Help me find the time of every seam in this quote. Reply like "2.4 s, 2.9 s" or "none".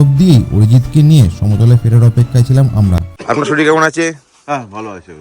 3.1 s